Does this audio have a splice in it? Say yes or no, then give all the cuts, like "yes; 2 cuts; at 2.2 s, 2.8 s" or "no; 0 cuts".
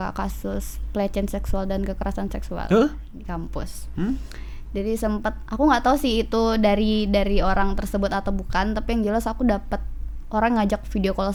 no; 0 cuts